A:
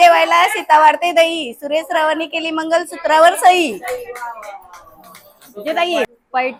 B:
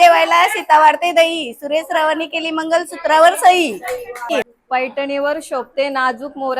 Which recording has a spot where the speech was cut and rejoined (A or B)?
B